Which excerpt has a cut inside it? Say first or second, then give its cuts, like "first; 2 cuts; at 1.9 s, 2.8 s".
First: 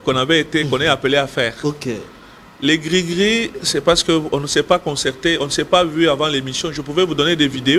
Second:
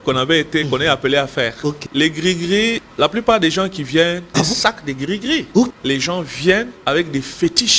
second; 5 cuts; at 1.8 s, 2.8 s, 4.3 s, 5.7 s, 6.7 s